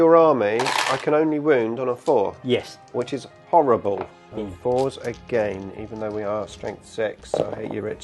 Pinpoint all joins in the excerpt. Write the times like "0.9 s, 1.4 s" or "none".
4.2 s